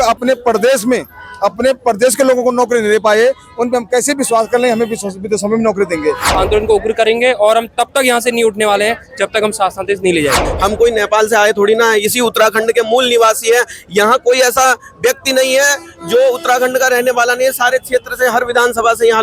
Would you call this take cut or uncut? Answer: cut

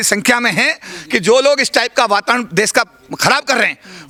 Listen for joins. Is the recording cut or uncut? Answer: uncut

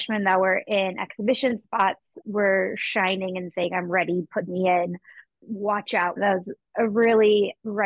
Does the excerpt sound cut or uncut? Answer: cut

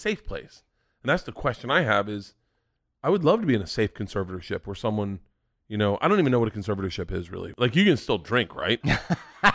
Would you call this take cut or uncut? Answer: cut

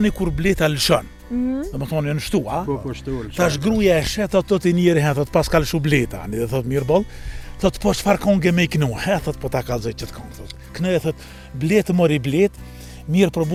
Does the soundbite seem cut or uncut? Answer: uncut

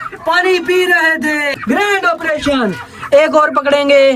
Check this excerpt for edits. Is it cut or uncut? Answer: cut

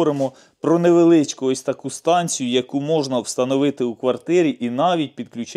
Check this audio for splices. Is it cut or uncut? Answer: uncut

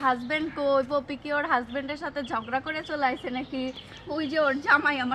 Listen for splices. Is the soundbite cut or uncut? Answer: uncut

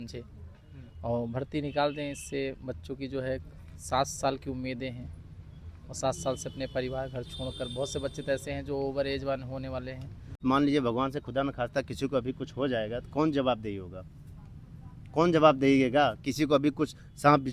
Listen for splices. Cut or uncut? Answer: cut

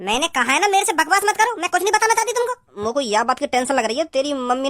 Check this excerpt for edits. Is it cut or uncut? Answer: cut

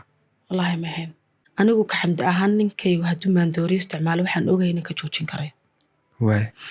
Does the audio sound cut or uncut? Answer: cut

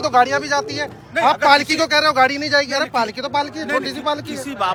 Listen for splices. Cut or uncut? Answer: uncut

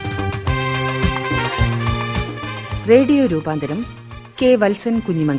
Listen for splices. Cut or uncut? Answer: cut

